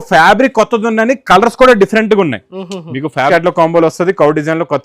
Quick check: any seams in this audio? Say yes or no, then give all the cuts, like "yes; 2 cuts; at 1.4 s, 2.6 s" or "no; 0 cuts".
yes; 1 cut; at 3.3 s